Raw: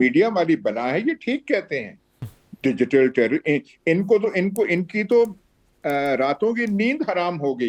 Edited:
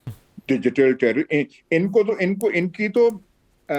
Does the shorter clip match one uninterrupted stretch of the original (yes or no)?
yes